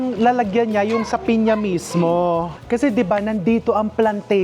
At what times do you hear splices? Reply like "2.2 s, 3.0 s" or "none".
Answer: 2.6 s

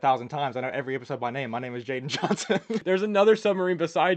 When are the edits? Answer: 2.8 s

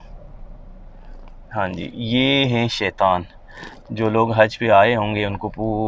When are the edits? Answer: none

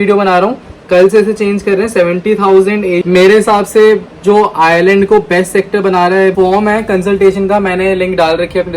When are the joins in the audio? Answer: 3.0 s, 6.3 s

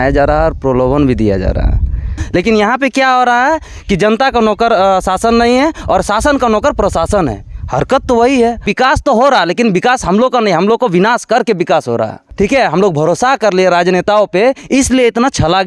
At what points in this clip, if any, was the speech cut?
2.2 s, 8.7 s, 12.2 s

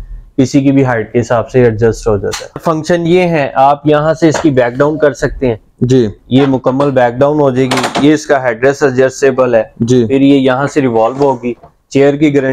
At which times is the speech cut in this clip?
2.6 s

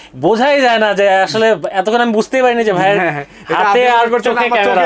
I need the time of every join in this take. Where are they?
none

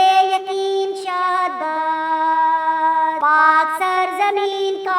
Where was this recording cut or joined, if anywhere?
none

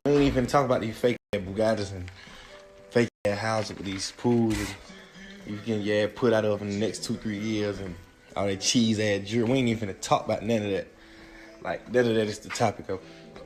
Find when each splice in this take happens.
none

